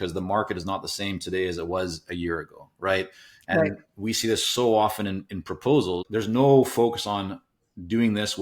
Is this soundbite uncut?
no; 1 cut; at 6.1 s

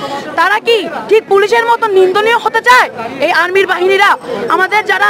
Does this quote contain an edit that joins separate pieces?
no; 0 cuts

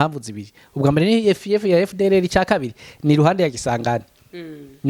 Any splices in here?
no; 0 cuts

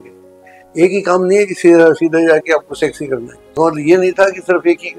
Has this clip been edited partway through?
yes; 1 cut; at 3.6 s

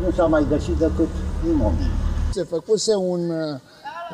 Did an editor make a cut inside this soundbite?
yes; 1 cut; at 2.3 s

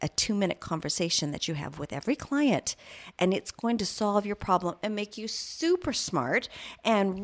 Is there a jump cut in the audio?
no; 0 cuts

